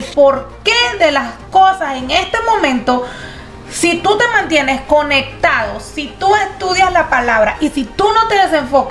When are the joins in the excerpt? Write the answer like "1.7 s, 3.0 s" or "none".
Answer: none